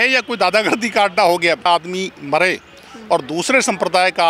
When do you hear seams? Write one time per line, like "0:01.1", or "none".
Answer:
0:01.7

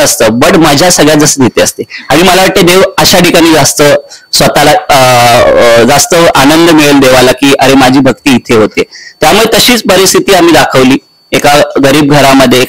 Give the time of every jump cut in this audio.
none

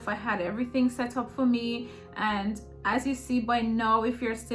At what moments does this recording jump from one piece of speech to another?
none

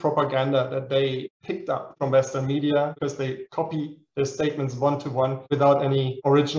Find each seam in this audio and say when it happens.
0:02.9
0:05.4

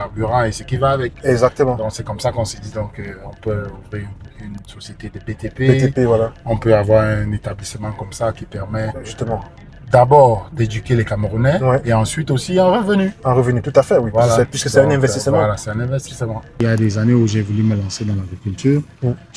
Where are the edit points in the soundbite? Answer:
0:16.6

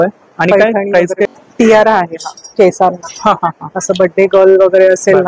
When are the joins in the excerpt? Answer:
0:01.3

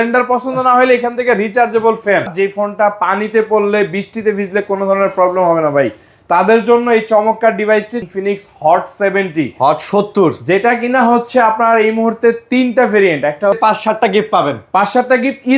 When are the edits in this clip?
0:02.3
0:08.1
0:13.5

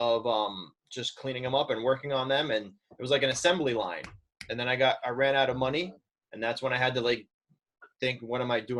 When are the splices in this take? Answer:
none

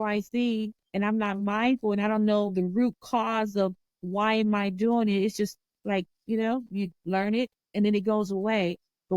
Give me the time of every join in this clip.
none

